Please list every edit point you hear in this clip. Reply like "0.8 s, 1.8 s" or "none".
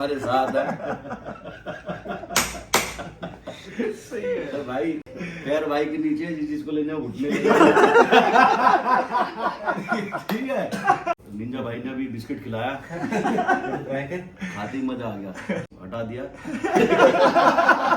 11.2 s, 15.7 s